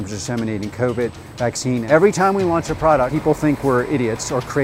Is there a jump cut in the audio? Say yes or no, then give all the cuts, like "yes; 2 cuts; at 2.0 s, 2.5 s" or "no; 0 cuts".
yes; 2 cuts; at 1.8 s, 3.1 s